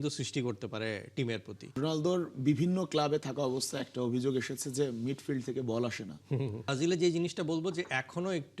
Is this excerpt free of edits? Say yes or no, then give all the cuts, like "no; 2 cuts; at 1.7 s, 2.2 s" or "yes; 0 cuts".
no; 2 cuts; at 1.8 s, 6.7 s